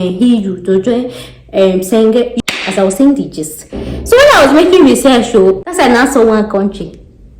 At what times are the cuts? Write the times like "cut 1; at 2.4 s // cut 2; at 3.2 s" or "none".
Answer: cut 1; at 2.3 s // cut 2; at 5.6 s